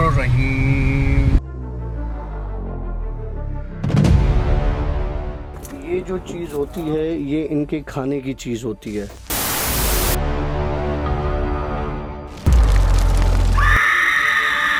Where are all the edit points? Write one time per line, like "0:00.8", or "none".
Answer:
none